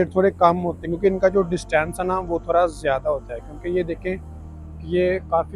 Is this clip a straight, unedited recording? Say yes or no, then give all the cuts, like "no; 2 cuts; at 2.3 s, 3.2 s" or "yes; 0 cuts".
yes; 0 cuts